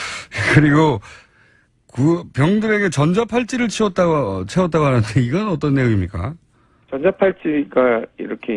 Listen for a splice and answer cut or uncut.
uncut